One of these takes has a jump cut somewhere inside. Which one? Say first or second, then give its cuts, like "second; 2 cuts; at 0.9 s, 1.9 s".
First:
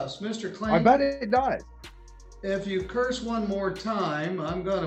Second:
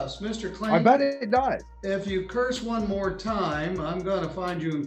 second; 1 cut; at 1.7 s